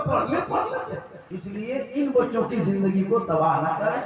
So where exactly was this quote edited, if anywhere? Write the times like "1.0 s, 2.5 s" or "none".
1.4 s

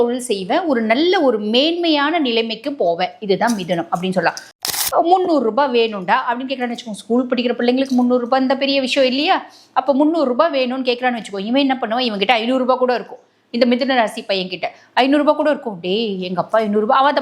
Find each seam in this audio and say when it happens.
4.6 s

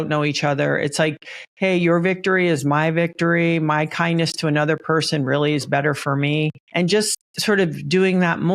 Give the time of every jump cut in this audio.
6.6 s, 7.2 s

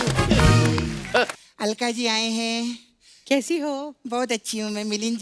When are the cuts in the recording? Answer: 1.3 s

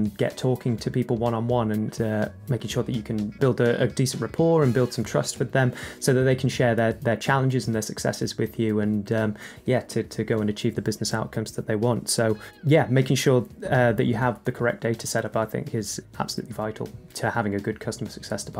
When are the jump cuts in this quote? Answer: none

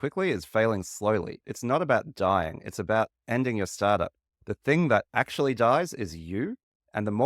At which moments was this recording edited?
1.4 s

